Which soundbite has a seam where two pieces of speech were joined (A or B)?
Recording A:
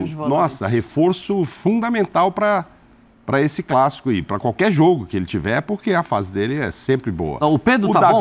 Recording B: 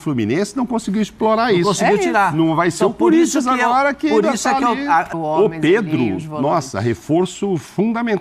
B